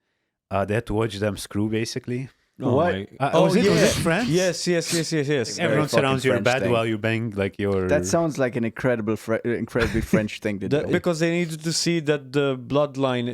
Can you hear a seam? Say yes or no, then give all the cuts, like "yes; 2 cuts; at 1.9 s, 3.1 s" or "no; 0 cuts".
yes; 2 cuts; at 5.6 s, 10.9 s